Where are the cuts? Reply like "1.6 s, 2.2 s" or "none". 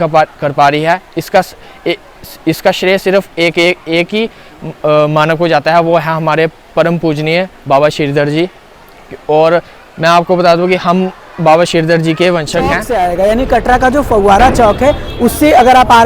12.8 s